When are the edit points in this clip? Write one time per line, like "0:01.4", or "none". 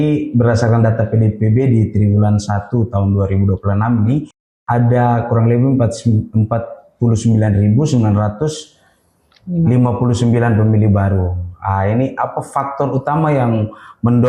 none